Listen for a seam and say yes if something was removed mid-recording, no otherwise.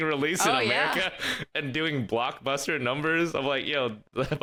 no